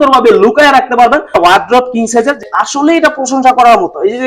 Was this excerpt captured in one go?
no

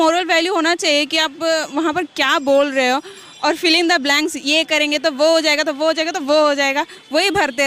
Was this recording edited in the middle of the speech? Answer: no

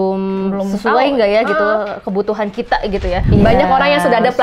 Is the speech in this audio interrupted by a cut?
yes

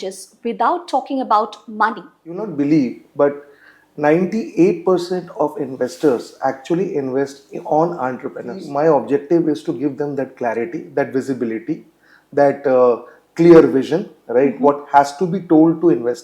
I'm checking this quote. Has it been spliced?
yes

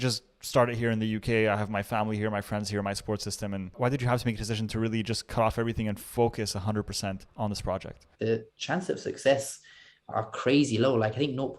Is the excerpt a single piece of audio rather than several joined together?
no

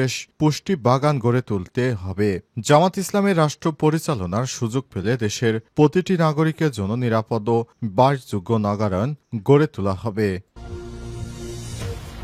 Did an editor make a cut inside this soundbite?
yes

